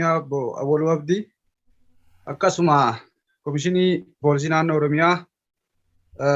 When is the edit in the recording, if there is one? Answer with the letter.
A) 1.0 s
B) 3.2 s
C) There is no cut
C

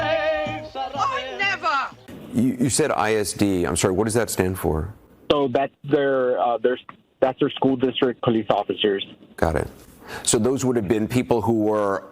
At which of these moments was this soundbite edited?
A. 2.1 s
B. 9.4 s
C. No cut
A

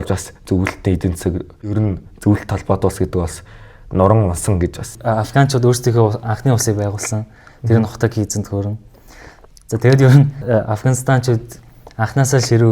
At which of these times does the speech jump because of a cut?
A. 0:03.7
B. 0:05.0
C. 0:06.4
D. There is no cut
B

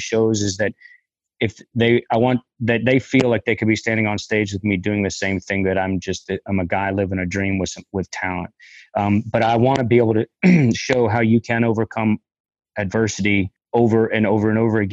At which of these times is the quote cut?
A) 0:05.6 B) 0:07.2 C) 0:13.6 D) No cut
C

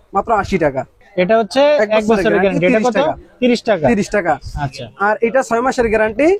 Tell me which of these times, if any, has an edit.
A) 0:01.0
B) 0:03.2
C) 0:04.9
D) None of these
A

